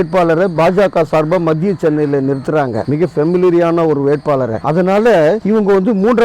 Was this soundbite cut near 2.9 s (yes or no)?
no